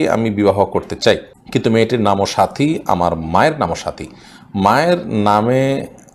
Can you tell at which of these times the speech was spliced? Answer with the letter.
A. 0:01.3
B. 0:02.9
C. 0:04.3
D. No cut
A